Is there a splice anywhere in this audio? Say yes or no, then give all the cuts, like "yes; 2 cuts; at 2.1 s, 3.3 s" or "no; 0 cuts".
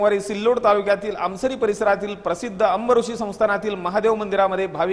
no; 0 cuts